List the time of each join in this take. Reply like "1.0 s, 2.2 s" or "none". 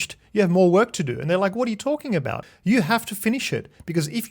2.5 s